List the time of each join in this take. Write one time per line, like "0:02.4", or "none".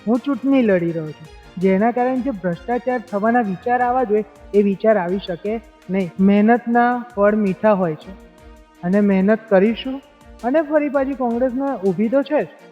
0:06.1